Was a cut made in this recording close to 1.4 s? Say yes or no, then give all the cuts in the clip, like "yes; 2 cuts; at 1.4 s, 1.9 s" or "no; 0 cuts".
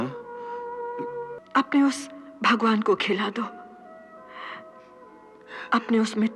yes; 1 cut; at 1.4 s